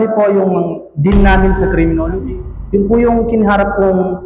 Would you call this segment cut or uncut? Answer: cut